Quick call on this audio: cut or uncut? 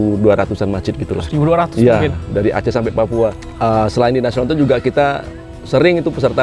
cut